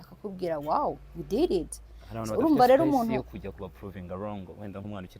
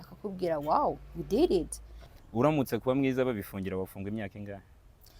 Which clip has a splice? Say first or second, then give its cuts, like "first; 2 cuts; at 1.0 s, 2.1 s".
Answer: second; 1 cut; at 2.1 s